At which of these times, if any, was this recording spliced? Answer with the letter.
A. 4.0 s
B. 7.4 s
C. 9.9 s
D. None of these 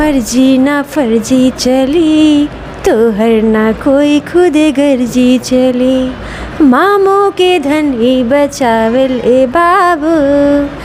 D